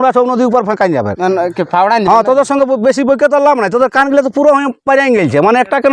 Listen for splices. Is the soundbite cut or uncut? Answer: uncut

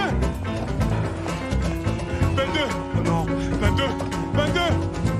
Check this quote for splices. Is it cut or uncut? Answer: uncut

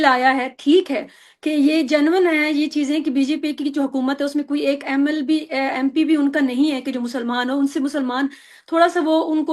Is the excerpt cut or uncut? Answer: uncut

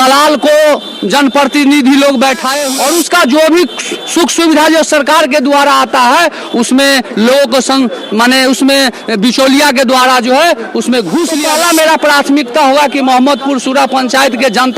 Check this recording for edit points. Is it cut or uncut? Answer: cut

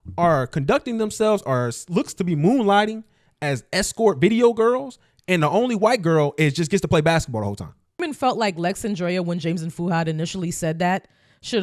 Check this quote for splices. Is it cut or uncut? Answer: cut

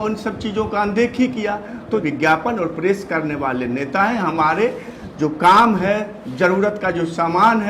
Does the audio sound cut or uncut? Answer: cut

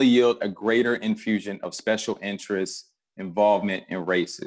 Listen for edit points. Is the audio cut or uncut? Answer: uncut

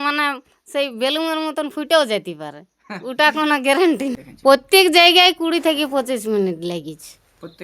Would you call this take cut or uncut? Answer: cut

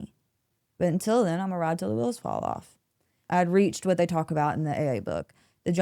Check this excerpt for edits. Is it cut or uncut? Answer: cut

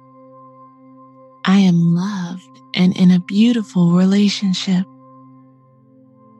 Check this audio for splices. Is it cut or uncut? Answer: cut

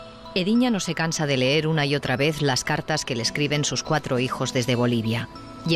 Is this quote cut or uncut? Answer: cut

